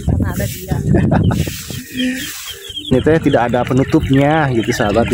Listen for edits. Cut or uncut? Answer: cut